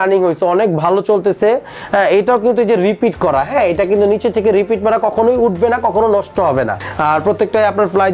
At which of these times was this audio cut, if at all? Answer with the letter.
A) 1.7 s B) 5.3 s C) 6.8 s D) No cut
C